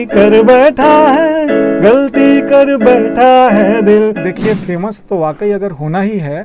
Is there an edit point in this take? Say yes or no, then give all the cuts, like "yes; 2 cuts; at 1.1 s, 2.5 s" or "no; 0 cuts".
yes; 1 cut; at 4.2 s